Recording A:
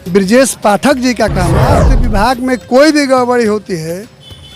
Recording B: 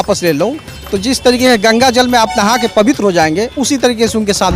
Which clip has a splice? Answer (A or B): A